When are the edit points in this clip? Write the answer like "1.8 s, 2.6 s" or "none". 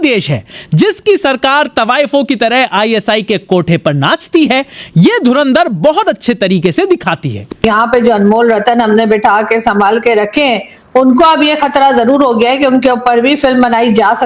7.6 s